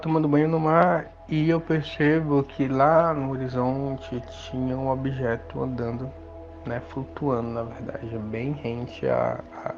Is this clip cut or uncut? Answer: cut